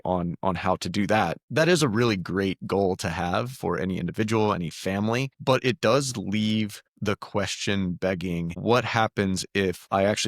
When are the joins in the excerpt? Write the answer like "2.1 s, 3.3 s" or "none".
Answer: 1.4 s, 5.3 s, 6.9 s, 8.6 s